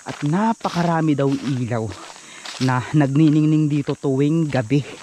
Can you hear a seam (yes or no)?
no